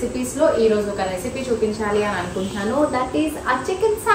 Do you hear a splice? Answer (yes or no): no